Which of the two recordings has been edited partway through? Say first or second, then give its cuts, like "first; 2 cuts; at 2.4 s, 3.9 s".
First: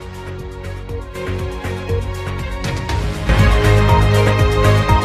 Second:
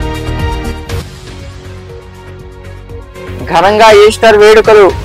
first; 1 cut; at 1.3 s